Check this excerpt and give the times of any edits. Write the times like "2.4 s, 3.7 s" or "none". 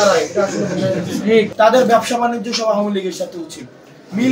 1.5 s